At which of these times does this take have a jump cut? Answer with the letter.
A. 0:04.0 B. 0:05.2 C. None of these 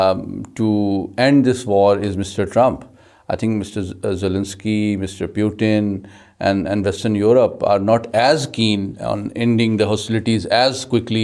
C